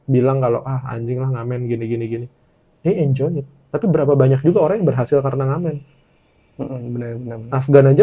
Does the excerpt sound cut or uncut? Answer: uncut